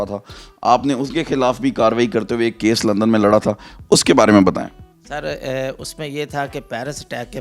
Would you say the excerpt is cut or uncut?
uncut